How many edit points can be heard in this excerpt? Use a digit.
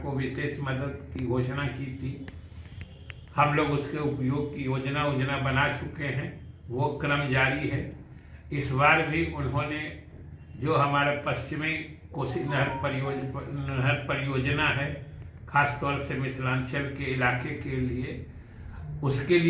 0